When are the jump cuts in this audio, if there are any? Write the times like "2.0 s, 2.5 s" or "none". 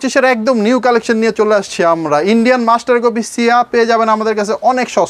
none